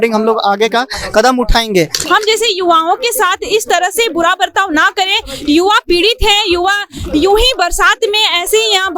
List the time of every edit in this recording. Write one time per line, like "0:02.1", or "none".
0:02.0